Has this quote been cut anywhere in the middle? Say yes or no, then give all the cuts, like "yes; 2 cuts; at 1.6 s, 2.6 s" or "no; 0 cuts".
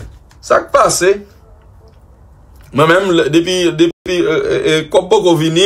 no; 0 cuts